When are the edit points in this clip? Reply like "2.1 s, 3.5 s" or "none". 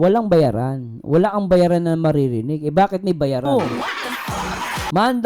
3.5 s